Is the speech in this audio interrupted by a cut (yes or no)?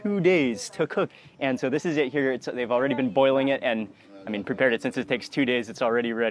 no